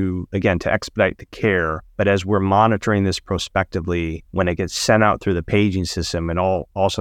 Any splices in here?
yes; 2 cuts; at 1.8 s, 4.2 s

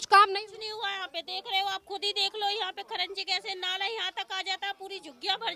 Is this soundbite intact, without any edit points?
yes; 0 cuts

